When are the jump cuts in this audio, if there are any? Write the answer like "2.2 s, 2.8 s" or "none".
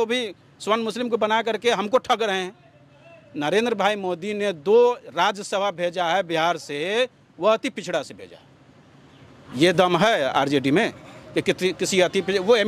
9.5 s